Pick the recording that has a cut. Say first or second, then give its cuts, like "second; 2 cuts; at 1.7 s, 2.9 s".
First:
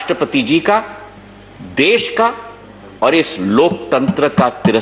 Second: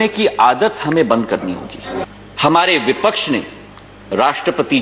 second; 1 cut; at 2.0 s